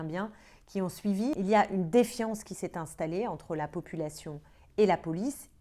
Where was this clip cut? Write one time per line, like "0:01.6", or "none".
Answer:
0:01.3